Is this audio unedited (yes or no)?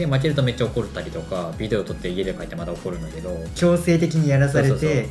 no